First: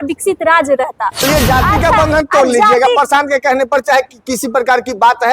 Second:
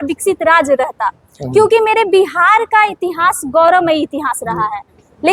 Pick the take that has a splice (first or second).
first